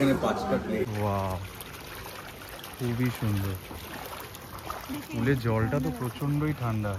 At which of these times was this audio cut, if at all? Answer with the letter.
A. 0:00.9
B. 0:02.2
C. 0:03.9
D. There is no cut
A